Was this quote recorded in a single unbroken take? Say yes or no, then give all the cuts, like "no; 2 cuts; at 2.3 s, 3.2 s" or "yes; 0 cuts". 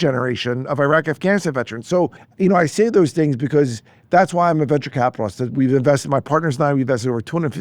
no; 1 cut; at 2.2 s